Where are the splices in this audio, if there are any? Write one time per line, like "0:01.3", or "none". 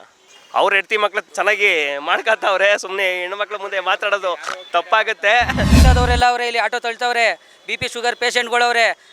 0:01.3
0:05.7